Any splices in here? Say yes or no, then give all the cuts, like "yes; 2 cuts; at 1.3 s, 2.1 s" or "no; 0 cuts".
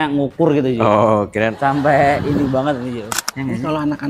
yes; 1 cut; at 3.1 s